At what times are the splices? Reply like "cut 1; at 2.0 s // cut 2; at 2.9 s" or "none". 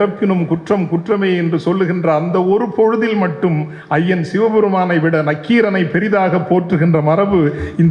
none